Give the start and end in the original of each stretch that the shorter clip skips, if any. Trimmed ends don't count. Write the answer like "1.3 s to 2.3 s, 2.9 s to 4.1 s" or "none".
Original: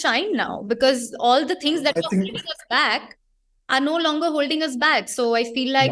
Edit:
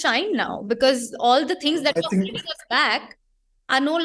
none